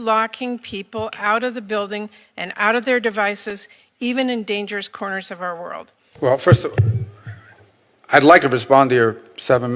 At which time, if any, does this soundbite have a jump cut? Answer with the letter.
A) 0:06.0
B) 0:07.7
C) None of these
A